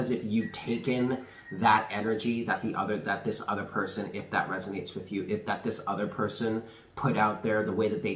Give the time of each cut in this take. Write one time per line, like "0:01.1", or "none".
none